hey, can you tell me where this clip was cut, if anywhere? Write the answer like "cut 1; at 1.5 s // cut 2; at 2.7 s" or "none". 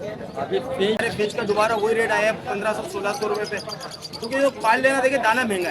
cut 1; at 1.0 s